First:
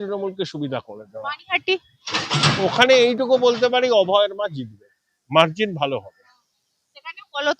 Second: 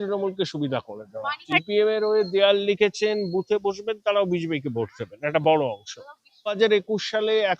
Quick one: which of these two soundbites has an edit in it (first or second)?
second